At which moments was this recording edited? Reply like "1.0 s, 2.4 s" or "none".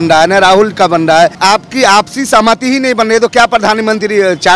1.4 s